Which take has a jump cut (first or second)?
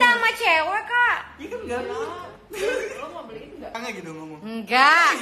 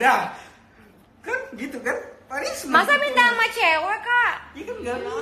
first